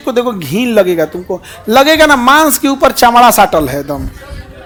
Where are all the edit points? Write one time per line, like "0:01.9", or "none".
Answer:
none